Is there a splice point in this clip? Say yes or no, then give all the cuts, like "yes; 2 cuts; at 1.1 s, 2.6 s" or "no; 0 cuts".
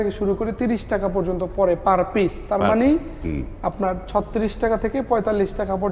no; 0 cuts